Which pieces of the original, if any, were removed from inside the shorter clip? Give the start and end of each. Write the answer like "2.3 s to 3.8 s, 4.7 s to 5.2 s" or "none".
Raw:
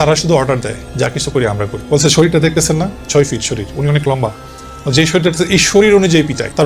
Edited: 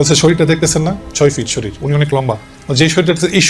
4.5 s to 4.7 s